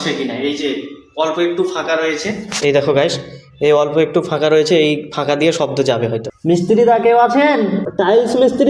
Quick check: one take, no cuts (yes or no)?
no